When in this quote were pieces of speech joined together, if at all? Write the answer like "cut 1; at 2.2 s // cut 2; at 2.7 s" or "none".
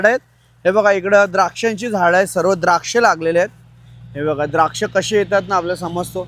none